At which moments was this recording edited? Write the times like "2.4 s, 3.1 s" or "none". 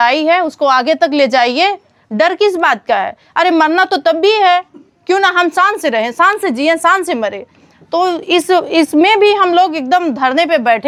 none